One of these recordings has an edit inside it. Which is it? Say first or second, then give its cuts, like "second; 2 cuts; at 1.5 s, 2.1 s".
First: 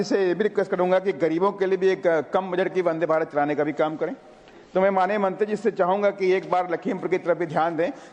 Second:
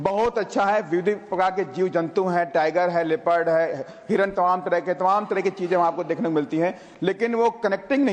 first; 1 cut; at 4.5 s